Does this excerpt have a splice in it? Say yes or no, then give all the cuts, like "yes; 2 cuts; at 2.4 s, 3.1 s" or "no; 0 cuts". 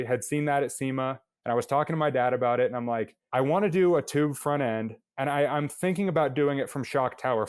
yes; 1 cut; at 1.3 s